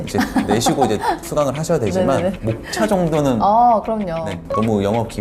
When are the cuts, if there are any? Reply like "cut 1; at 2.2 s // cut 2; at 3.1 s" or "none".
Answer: none